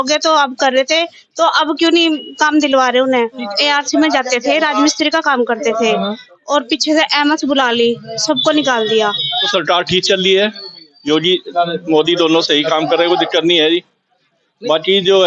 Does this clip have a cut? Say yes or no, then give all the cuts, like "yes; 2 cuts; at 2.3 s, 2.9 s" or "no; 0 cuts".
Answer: yes; 2 cuts; at 3.5 s, 9.5 s